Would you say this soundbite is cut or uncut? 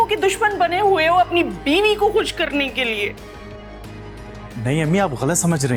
uncut